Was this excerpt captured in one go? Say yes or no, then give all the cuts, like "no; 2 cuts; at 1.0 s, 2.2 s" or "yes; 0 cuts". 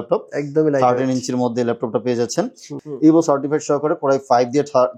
no; 1 cut; at 2.7 s